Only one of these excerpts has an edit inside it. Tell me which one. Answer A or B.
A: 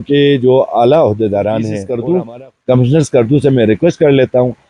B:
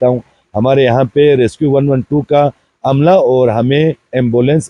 A